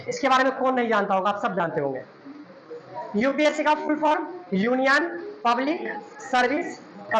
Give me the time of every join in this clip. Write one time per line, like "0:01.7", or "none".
none